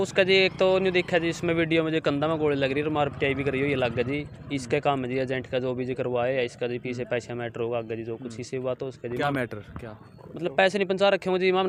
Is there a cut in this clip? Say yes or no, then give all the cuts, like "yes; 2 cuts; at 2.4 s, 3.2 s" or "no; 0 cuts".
no; 0 cuts